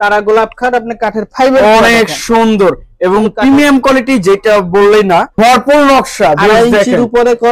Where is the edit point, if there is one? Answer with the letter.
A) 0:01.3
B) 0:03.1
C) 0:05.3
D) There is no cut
C